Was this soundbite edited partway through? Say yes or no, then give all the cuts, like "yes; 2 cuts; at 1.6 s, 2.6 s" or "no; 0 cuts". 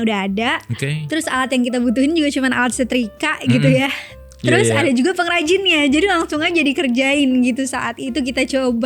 no; 0 cuts